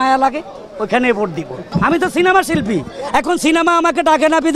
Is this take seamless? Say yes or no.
no